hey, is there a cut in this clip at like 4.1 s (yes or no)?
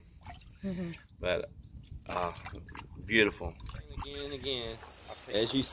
yes